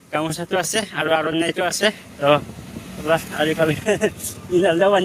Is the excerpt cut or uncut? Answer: uncut